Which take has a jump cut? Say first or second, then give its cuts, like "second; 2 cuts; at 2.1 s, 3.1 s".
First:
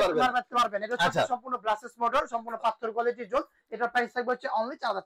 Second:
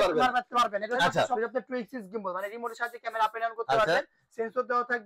second; 1 cut; at 1.4 s